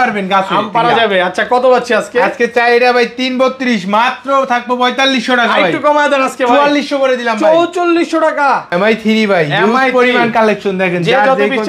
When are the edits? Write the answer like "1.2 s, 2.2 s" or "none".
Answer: 8.7 s